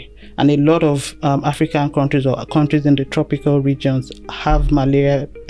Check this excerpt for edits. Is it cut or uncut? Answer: uncut